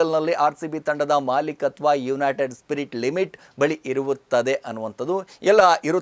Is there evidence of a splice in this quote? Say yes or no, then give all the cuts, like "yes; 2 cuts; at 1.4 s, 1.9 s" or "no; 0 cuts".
no; 0 cuts